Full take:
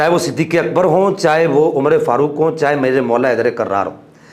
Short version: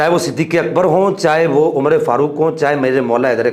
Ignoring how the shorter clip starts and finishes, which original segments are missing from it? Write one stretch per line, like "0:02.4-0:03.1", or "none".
none